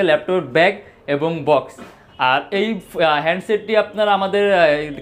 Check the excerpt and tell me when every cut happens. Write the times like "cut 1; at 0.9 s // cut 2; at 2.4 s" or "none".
none